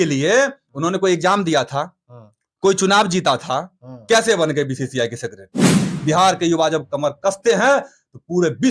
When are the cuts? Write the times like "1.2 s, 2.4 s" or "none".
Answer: 5.9 s